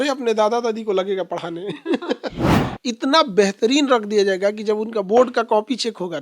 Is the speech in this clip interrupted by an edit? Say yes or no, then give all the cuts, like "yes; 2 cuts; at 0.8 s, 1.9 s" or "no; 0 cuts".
yes; 1 cut; at 2.5 s